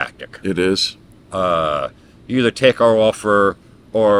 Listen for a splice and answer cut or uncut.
uncut